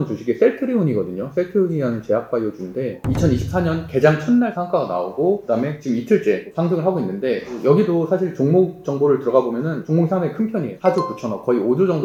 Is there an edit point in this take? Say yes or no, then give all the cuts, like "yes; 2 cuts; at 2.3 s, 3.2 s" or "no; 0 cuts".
no; 0 cuts